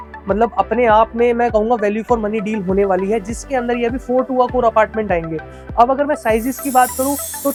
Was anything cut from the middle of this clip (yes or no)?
no